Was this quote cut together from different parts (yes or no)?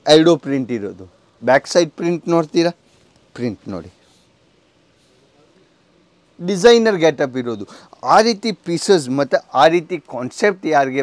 no